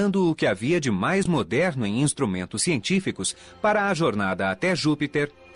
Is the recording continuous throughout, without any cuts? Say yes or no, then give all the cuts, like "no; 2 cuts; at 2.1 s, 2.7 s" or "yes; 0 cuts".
yes; 0 cuts